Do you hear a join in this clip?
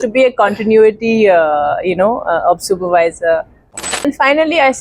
yes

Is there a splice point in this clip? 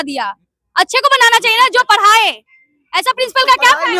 no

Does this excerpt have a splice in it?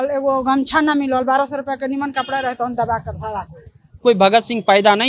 yes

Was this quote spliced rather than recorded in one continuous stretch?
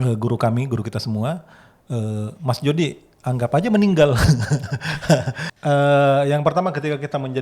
yes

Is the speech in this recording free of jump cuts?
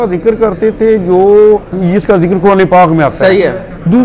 no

